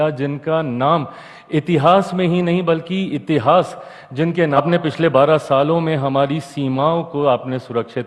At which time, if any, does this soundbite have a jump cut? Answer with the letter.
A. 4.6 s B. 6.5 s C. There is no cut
A